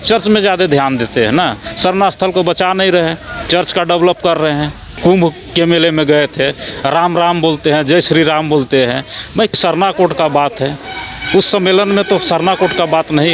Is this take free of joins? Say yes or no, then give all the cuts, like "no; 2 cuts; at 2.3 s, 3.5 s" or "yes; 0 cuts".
no; 2 cuts; at 4.9 s, 9.6 s